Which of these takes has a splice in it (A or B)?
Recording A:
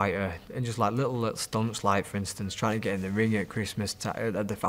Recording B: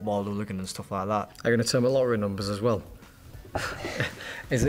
B